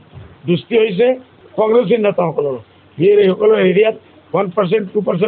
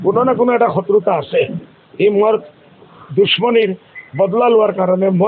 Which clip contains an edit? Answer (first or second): first